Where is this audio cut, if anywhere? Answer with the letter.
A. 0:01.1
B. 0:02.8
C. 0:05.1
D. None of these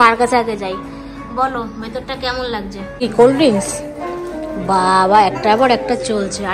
B